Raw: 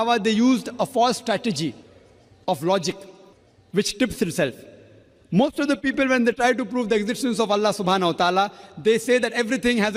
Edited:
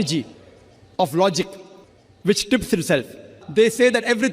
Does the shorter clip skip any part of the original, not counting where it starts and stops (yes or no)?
yes